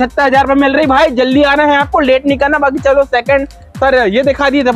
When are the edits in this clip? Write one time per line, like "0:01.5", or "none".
none